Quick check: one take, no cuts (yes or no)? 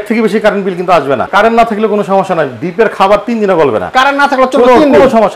no